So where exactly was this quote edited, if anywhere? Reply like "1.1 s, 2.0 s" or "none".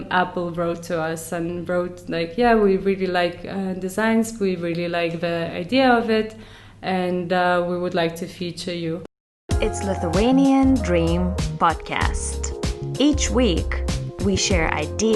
9.5 s

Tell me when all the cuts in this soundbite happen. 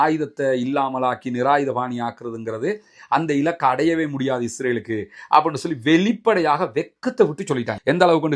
none

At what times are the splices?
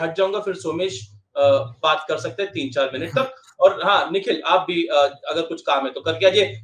none

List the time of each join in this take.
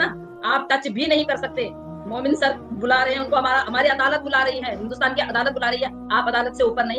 none

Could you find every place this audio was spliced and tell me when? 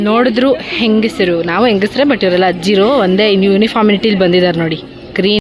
none

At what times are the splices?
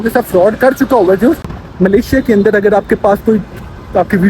1.5 s

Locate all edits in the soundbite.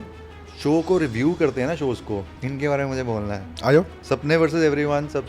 2.3 s, 4.0 s

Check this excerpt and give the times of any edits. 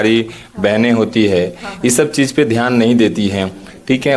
none

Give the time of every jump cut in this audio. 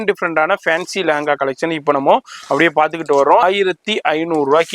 3.4 s

